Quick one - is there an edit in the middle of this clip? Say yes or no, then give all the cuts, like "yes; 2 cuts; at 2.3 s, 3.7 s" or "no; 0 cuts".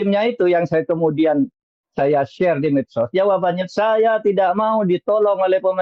no; 0 cuts